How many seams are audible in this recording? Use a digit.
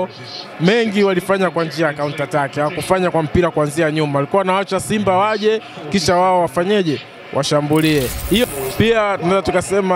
1